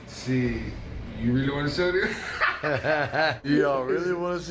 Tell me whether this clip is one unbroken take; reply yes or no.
no